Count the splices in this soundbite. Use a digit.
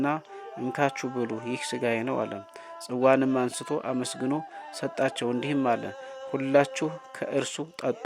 0